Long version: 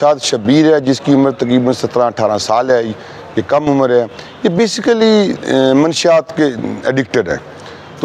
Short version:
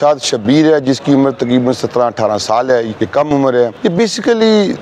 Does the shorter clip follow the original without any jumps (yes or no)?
no